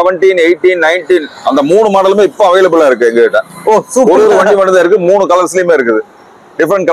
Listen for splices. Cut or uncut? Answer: uncut